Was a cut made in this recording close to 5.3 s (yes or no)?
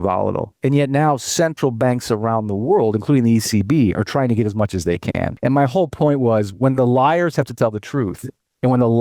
yes